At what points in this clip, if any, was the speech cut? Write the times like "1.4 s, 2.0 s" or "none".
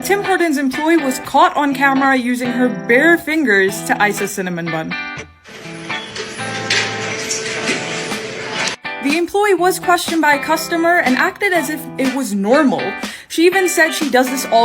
5.1 s, 7.8 s